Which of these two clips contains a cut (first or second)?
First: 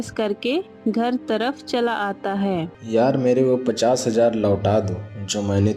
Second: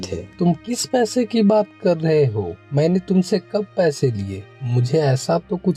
first